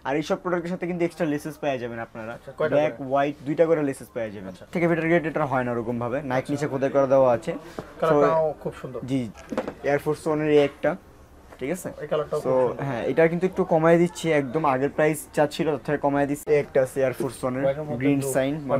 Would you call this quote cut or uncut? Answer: cut